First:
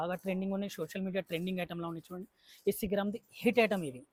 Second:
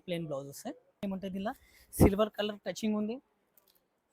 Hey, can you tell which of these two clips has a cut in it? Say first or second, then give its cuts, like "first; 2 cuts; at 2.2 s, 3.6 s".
second; 1 cut; at 1.0 s